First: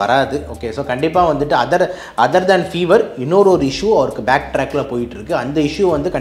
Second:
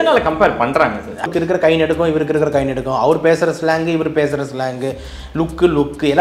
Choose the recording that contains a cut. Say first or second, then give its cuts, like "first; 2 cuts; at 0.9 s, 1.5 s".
second; 1 cut; at 1.3 s